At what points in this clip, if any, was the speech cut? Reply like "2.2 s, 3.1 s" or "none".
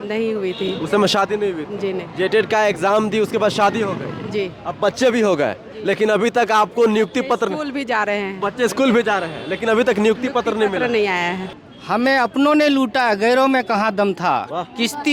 11.4 s